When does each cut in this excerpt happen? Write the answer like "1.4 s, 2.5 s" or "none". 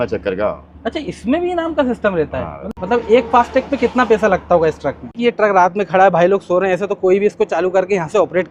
2.6 s, 5.2 s